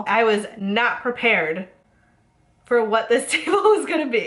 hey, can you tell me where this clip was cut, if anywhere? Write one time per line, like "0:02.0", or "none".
none